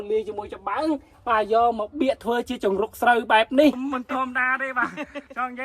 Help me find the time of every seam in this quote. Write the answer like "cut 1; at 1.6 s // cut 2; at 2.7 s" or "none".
cut 1; at 3.8 s